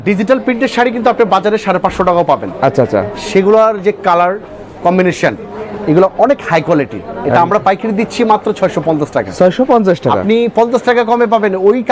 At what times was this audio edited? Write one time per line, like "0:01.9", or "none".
none